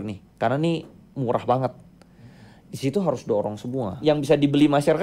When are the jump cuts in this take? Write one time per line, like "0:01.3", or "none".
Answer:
0:03.9